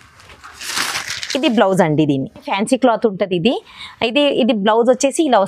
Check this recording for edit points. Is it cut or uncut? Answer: cut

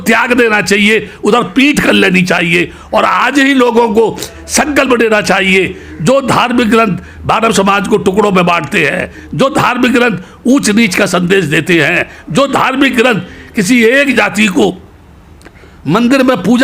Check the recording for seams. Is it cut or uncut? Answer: uncut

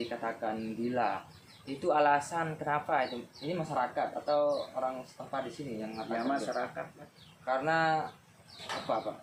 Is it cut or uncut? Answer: uncut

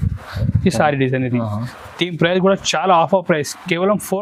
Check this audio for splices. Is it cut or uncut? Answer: uncut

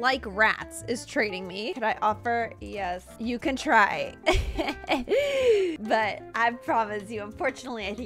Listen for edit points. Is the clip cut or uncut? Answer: cut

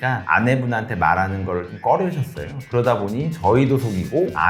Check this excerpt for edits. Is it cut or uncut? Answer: uncut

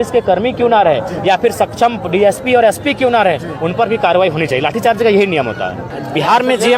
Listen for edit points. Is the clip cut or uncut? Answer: cut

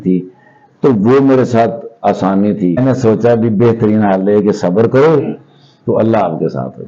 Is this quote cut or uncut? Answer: cut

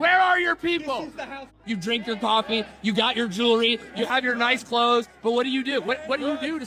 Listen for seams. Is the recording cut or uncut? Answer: cut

